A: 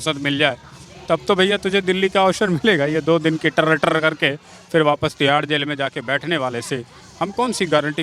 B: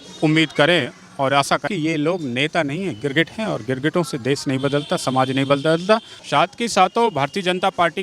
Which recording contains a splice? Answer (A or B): B